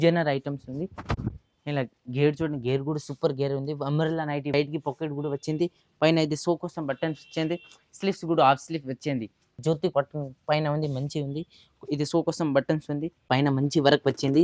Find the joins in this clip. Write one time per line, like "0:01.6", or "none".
0:04.5
0:09.6
0:13.3